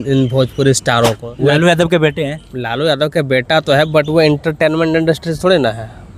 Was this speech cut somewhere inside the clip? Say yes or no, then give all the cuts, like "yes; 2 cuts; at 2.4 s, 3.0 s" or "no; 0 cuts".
yes; 1 cut; at 1.3 s